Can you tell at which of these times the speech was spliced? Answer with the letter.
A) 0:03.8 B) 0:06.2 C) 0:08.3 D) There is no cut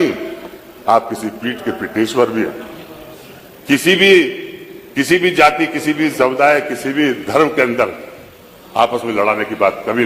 D